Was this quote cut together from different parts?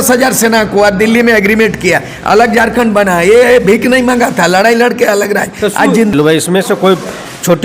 yes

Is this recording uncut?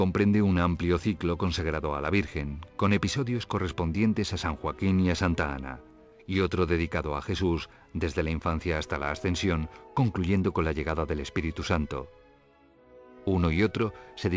no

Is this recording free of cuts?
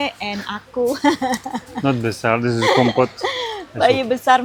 yes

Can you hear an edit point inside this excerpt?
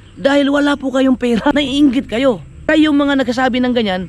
yes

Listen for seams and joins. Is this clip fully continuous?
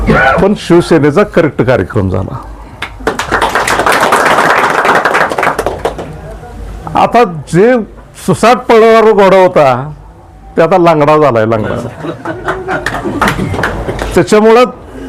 yes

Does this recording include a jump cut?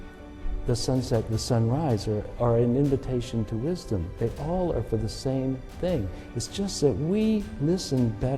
no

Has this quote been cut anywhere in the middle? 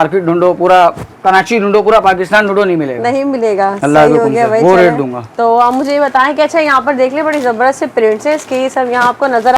no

